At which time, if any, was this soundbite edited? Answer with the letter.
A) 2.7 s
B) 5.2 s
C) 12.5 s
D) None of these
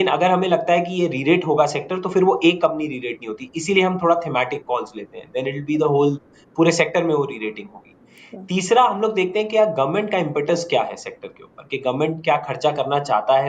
D